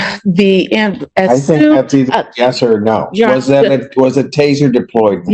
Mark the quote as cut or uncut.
uncut